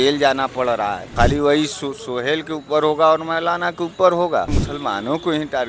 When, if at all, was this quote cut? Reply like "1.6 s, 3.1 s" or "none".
1.0 s, 4.6 s